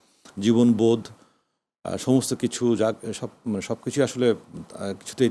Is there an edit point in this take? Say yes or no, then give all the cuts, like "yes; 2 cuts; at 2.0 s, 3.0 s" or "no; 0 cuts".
no; 0 cuts